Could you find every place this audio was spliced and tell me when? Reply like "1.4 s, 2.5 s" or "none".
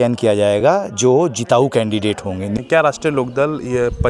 2.6 s